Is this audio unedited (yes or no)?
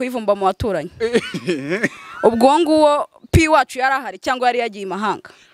yes